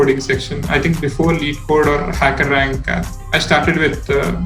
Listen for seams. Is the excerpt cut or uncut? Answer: uncut